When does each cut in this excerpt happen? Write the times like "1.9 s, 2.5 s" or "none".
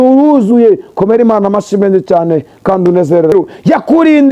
3.3 s